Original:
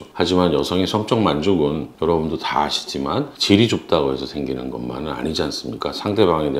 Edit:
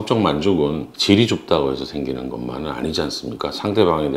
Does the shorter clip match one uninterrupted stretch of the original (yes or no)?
no